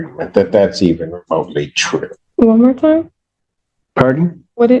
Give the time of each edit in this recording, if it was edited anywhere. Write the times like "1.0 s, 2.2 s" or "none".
2.2 s